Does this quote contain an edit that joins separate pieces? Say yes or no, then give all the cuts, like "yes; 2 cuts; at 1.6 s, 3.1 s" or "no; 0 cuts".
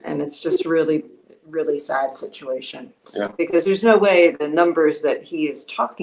no; 0 cuts